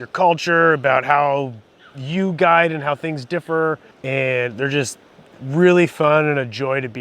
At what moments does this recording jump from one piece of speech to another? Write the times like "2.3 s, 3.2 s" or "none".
3.9 s